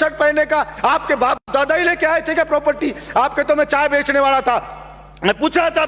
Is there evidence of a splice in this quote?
no; 0 cuts

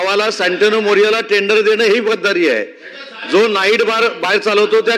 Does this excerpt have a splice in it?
no; 0 cuts

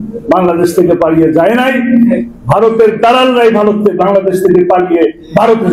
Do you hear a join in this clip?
no; 0 cuts

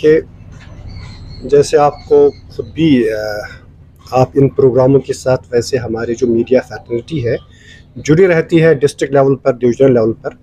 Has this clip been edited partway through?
no; 0 cuts

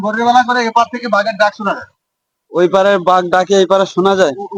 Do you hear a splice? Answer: no; 0 cuts

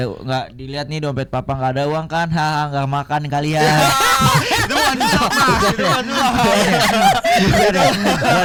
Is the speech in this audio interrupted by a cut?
no; 0 cuts

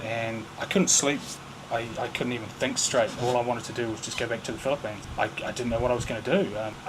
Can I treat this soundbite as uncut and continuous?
yes; 0 cuts

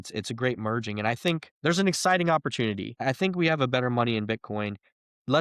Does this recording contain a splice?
yes; 2 cuts; at 1.5 s, 3.0 s

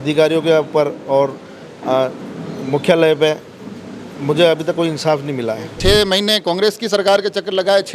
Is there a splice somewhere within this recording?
yes; 1 cut; at 5.8 s

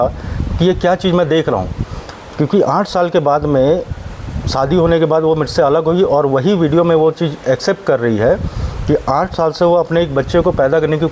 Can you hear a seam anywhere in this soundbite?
no; 0 cuts

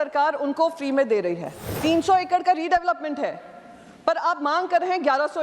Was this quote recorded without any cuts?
no; 1 cut; at 1.6 s

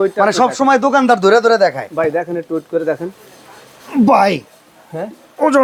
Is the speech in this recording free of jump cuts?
yes; 0 cuts

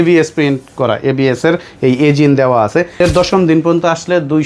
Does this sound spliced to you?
yes; 1 cut; at 3.0 s

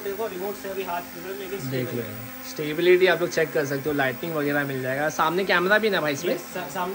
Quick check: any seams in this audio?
no; 0 cuts

